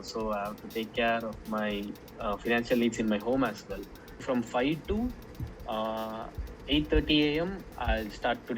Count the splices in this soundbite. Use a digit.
1